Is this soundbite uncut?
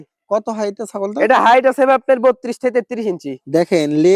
yes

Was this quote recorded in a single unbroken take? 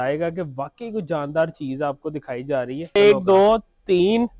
no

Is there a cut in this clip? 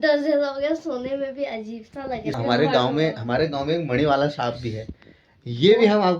yes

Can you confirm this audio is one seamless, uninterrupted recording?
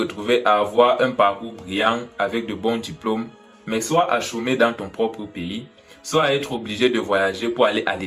yes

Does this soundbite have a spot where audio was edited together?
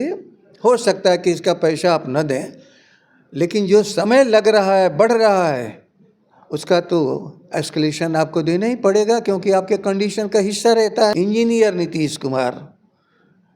yes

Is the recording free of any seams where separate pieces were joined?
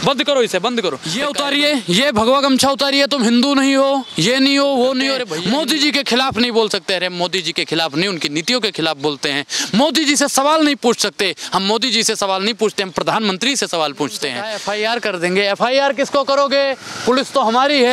no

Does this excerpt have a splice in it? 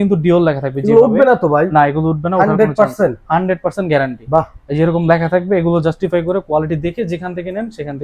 no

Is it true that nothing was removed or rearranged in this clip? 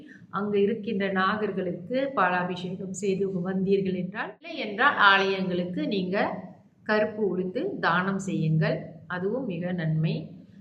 no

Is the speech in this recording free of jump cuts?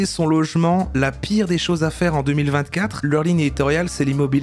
no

